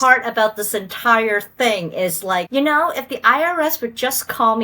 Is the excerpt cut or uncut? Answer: cut